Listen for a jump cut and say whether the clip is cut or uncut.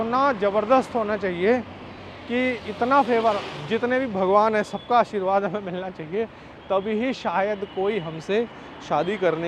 uncut